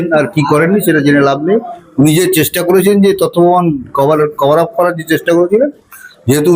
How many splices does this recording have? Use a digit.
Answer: 0